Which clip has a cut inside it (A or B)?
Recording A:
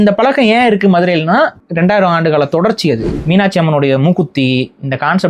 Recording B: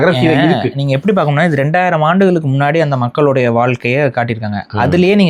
A